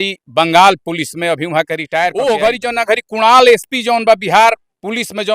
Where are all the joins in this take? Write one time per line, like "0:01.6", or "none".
0:02.1